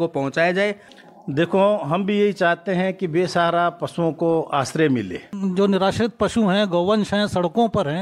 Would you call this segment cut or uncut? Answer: cut